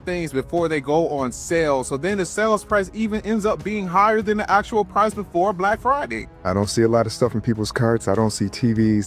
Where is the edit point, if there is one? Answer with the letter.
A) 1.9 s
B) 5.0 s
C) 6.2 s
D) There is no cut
C